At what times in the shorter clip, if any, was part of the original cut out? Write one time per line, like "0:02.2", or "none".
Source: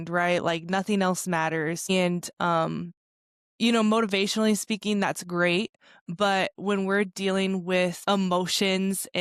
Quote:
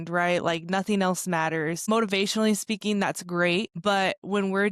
0:01.9
0:03.7